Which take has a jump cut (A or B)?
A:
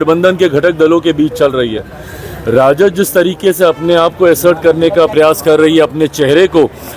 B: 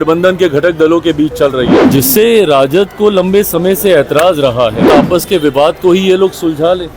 B